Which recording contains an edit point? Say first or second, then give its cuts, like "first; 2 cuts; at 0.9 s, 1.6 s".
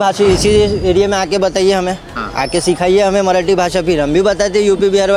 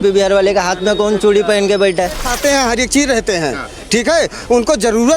second; 1 cut; at 2.3 s